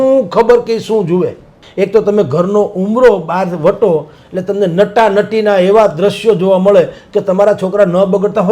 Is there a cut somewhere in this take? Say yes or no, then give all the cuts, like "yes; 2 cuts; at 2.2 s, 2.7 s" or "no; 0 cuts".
yes; 1 cut; at 1.6 s